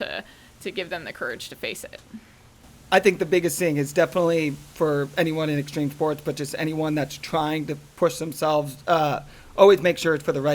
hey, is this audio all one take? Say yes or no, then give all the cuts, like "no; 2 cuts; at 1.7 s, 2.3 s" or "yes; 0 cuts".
no; 1 cut; at 2.7 s